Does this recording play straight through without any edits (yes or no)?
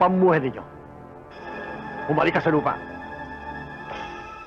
yes